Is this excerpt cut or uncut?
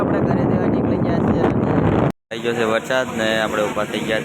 cut